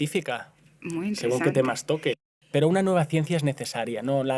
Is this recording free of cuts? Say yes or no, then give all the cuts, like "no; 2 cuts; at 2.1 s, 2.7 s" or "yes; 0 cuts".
no; 1 cut; at 2.2 s